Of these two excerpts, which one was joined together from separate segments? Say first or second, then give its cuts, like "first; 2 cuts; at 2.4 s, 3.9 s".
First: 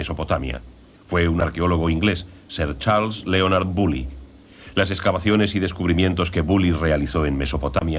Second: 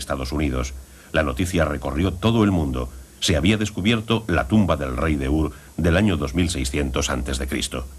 first; 1 cut; at 4.9 s